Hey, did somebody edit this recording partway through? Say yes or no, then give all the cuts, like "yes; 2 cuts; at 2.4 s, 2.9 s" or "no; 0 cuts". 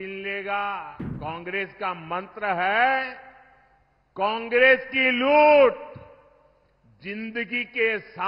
yes; 1 cut; at 1.0 s